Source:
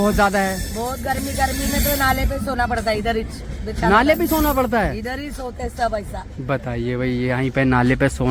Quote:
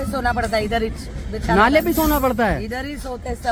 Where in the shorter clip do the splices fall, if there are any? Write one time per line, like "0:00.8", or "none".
none